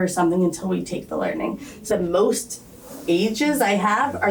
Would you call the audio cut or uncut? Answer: cut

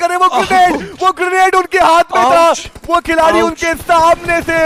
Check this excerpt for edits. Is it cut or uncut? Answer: uncut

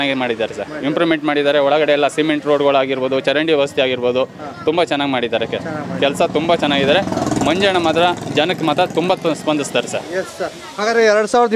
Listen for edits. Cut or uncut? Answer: uncut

